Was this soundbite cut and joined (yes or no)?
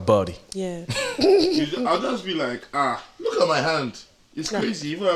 no